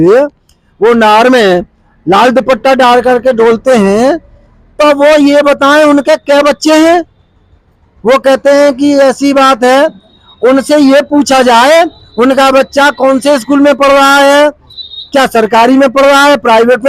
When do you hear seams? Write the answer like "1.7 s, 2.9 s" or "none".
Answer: none